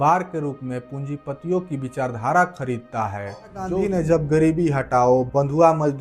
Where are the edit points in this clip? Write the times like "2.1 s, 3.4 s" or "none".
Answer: 3.7 s